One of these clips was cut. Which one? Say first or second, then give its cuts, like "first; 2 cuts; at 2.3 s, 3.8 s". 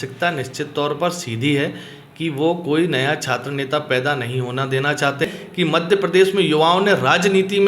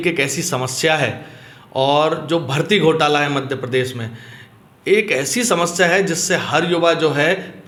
first; 1 cut; at 5.2 s